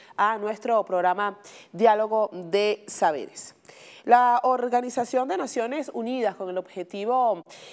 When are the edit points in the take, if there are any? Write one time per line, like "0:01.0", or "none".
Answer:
none